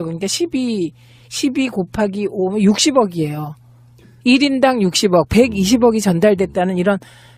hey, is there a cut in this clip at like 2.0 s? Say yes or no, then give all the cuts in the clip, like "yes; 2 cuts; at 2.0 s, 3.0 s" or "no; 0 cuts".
yes; 1 cut; at 2.0 s